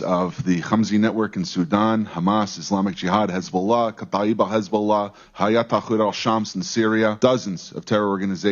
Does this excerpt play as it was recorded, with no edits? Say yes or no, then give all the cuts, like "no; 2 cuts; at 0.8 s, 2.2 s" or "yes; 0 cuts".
no; 1 cut; at 7.2 s